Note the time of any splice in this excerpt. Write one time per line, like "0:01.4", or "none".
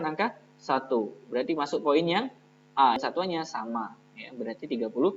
0:03.0